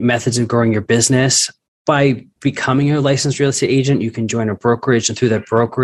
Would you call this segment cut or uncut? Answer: cut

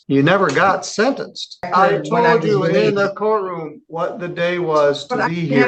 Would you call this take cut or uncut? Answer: cut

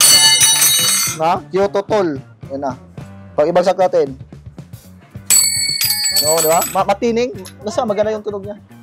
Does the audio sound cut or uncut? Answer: uncut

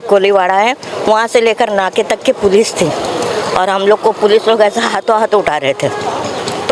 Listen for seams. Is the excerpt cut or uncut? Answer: uncut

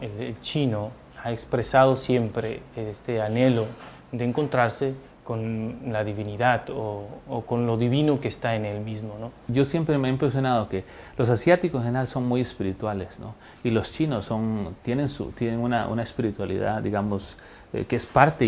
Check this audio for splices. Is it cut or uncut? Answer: uncut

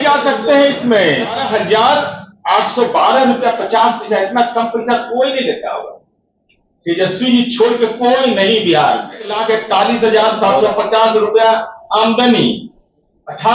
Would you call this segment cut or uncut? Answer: cut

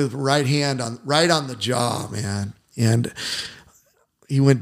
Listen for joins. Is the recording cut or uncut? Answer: uncut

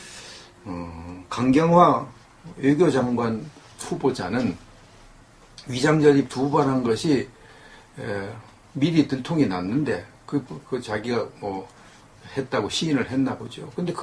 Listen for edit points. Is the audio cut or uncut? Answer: uncut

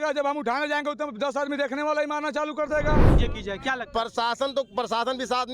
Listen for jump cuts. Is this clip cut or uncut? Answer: cut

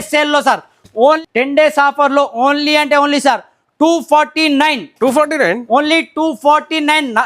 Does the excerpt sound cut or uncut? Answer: cut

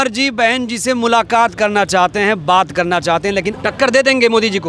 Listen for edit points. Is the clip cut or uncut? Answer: cut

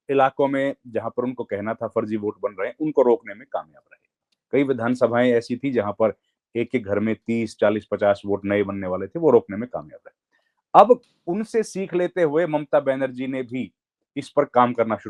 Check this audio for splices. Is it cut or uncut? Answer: uncut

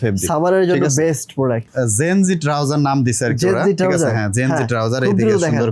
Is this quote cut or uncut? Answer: cut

